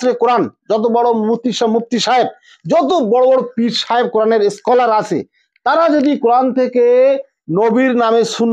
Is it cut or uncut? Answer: uncut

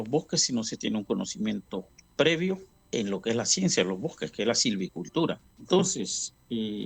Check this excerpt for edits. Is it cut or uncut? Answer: cut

